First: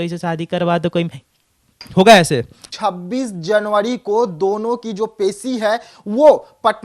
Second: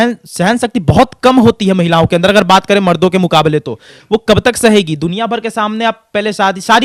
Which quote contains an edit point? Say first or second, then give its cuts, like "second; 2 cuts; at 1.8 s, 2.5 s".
first; 1 cut; at 2.6 s